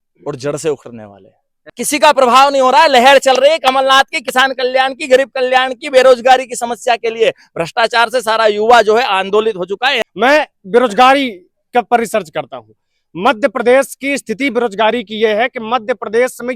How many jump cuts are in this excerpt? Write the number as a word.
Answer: two